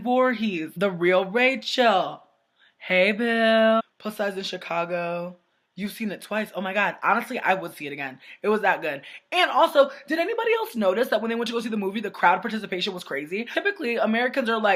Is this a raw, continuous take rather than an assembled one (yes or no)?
yes